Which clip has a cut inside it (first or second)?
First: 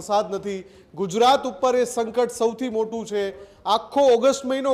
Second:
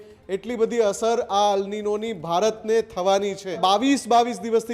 second